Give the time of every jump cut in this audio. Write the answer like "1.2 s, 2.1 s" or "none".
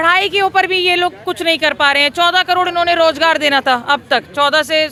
none